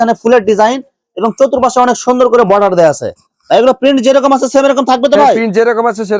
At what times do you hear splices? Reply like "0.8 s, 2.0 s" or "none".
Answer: none

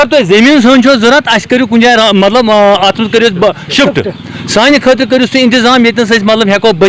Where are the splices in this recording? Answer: none

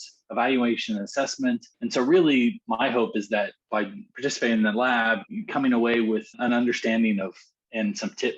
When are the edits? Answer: 1.7 s, 2.6 s, 3.6 s, 5.3 s

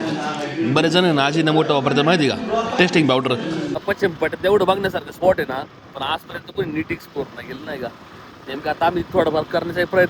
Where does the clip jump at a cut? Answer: 3.8 s

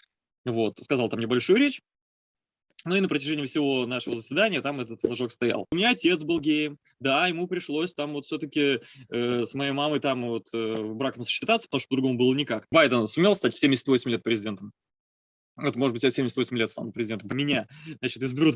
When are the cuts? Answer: 5.7 s, 12.7 s, 17.3 s

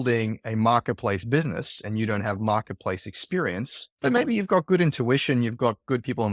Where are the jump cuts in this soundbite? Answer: none

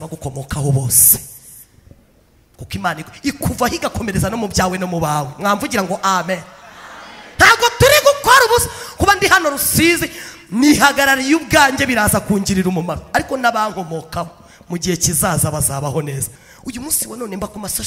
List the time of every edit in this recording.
16.3 s

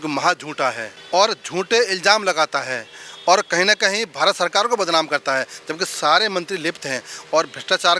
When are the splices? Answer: 0.9 s

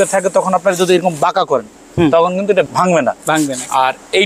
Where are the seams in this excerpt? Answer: 2.7 s

